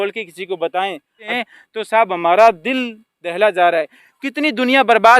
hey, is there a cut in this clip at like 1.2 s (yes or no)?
yes